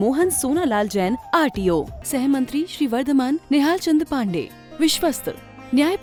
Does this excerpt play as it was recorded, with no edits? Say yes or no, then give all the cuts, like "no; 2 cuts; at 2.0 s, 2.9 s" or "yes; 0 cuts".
yes; 0 cuts